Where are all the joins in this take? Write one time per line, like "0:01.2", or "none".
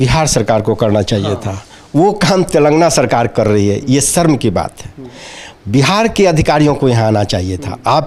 none